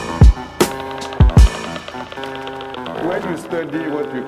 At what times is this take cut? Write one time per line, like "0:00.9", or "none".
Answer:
0:01.4